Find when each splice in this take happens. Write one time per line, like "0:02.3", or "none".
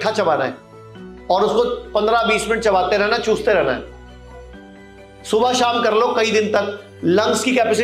none